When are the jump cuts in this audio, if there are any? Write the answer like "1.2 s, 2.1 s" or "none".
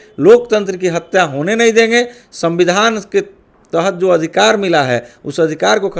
none